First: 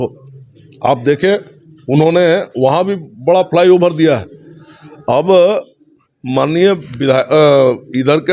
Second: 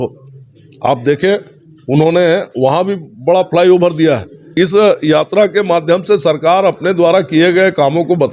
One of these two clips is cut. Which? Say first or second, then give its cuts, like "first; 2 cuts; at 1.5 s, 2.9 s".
second; 1 cut; at 4.5 s